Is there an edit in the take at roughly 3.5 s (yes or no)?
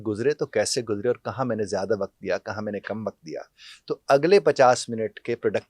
no